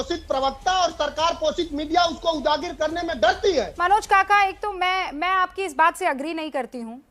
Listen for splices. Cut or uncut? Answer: uncut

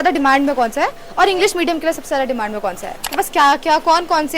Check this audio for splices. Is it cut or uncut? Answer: cut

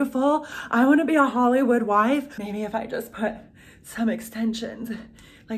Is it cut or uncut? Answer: cut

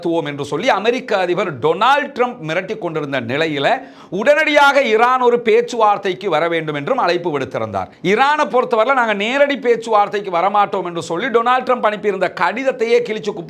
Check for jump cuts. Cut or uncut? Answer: uncut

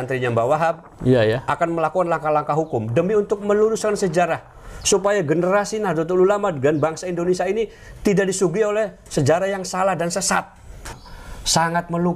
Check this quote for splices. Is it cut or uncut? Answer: cut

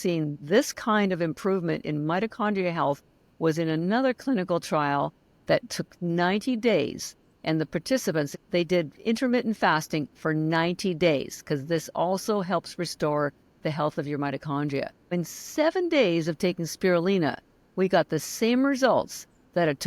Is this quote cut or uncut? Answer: cut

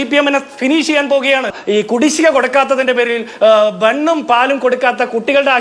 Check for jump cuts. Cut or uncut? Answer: cut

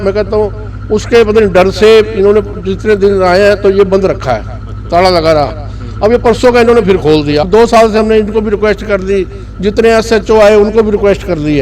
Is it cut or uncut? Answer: cut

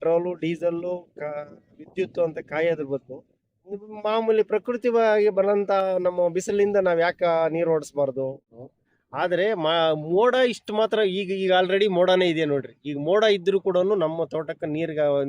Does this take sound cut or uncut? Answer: cut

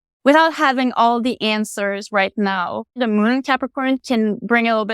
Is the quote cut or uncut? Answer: cut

